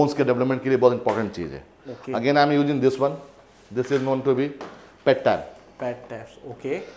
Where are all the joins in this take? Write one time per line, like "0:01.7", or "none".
none